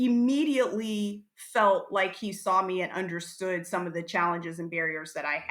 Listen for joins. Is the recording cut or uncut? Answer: uncut